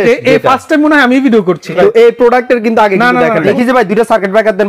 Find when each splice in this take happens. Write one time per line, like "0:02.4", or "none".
0:01.7
0:03.5

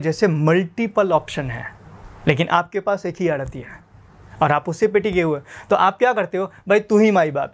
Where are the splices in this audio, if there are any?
none

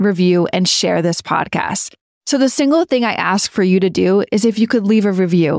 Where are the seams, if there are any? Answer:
none

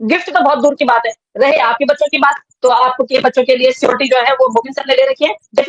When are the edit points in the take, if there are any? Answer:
none

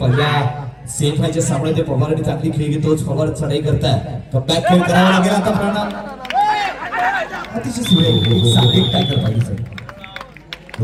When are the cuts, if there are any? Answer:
none

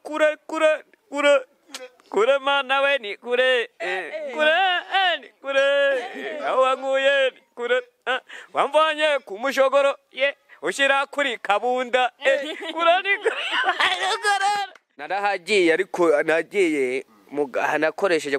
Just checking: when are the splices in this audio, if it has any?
0:15.1

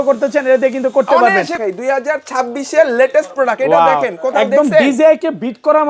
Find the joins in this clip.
0:01.5

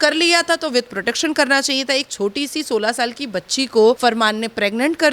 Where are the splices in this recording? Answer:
0:04.0

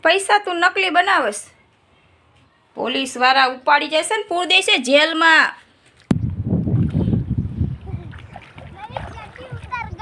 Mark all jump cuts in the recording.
0:06.0

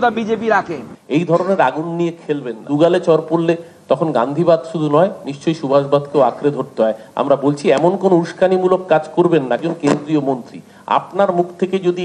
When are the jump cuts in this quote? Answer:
0:00.9

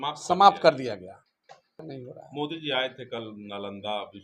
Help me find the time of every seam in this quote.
0:01.8

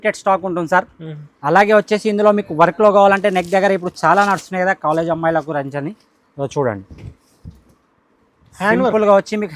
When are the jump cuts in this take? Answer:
none

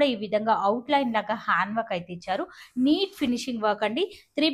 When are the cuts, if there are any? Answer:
none

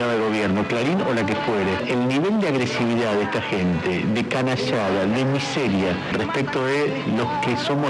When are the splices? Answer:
0:01.8

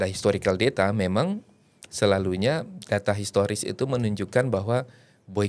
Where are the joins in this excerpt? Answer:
none

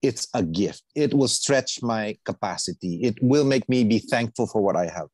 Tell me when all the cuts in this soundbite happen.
0:00.9

